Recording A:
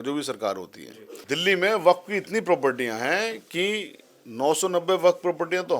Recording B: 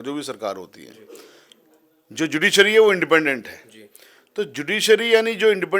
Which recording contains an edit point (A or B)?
A